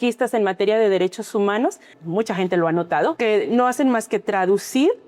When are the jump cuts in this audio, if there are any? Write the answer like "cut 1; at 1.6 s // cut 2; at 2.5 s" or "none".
cut 1; at 2.0 s // cut 2; at 3.2 s